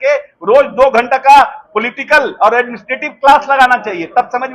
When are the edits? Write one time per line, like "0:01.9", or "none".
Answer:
none